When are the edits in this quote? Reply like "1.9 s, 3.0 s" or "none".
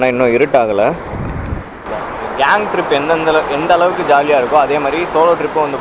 1.9 s